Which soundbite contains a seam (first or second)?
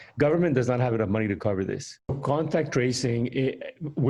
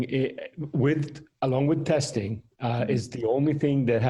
first